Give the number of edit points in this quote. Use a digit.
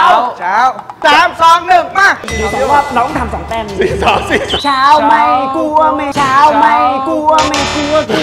1